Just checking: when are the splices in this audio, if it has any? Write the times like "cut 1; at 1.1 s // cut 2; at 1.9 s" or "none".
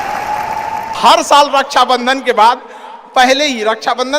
cut 1; at 0.9 s